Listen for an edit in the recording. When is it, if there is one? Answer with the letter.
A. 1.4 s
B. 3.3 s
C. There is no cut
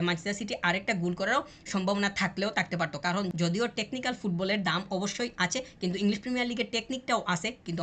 B